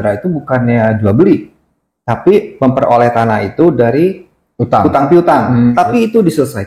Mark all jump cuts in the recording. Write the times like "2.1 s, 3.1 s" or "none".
5.7 s